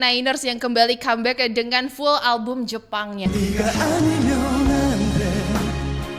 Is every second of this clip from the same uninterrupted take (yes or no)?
yes